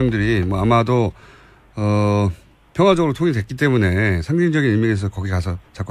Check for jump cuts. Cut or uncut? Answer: uncut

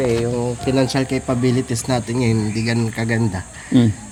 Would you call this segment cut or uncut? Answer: uncut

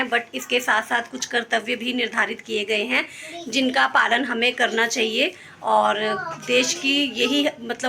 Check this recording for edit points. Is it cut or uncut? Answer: uncut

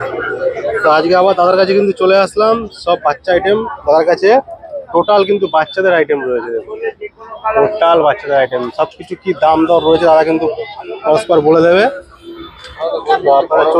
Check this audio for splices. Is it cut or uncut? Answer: uncut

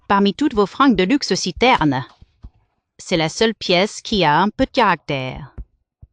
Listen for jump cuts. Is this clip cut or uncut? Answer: uncut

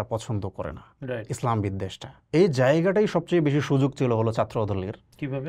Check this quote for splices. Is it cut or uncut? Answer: cut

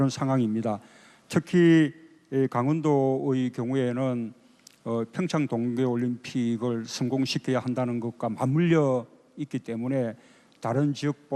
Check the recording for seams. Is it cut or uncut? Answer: uncut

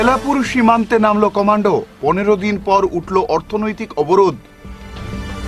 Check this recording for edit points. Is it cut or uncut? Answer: uncut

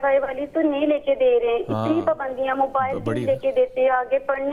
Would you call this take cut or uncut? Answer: uncut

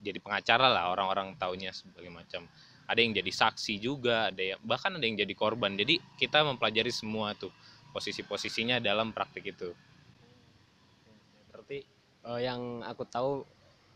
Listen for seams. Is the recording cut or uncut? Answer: uncut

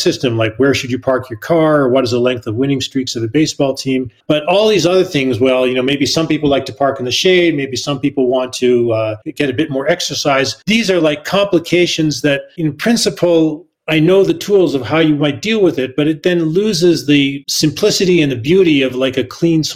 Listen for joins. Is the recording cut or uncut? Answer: uncut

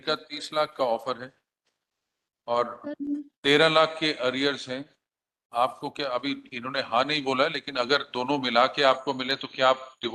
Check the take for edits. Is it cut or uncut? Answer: uncut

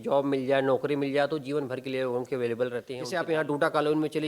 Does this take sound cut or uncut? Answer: cut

